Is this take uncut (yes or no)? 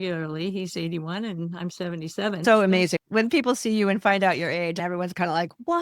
no